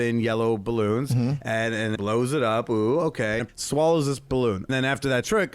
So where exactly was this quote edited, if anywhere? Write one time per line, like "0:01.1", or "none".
0:02.0
0:03.4
0:04.7